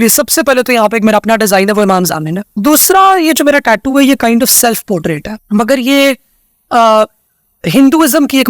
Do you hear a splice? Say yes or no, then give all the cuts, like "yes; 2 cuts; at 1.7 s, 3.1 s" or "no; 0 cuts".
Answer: yes; 2 cuts; at 2.5 s, 5.3 s